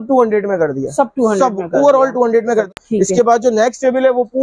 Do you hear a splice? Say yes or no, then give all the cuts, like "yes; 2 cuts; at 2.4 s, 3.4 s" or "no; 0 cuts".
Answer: yes; 1 cut; at 2.7 s